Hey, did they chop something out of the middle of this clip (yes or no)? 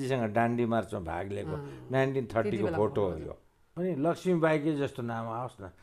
yes